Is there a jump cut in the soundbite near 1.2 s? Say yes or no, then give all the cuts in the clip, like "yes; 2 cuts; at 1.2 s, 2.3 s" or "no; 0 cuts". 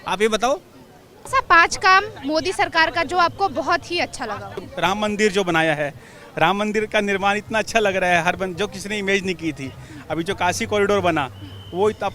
yes; 2 cuts; at 1.2 s, 4.7 s